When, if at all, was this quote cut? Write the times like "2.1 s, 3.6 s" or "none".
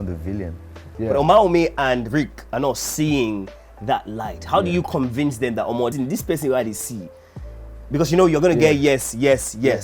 0.9 s